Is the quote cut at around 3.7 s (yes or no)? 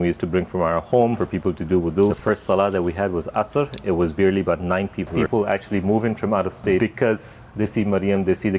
no